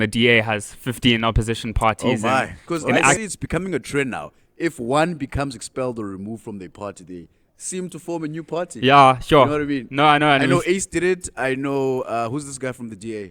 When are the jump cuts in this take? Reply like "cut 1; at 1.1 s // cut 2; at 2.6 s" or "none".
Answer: cut 1; at 3.2 s